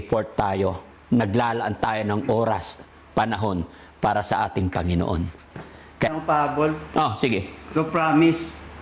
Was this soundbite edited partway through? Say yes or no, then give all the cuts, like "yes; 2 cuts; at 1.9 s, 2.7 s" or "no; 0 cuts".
yes; 1 cut; at 6.1 s